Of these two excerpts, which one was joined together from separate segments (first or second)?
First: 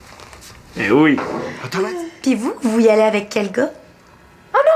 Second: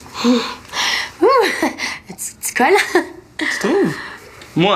first